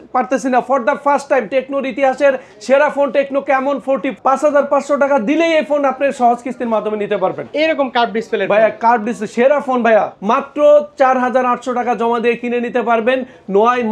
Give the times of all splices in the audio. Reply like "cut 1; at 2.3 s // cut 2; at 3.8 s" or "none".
cut 1; at 4.1 s // cut 2; at 10.1 s